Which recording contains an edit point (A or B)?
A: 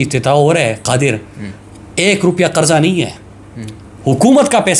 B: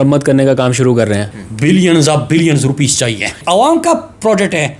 B